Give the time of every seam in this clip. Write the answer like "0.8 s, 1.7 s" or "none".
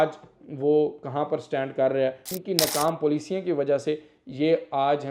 2.3 s